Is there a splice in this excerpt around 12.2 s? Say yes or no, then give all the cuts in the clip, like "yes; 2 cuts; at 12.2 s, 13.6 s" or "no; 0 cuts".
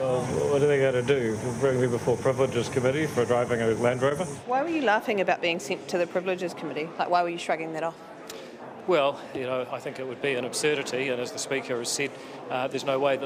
no; 0 cuts